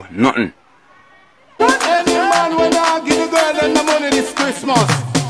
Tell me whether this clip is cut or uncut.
cut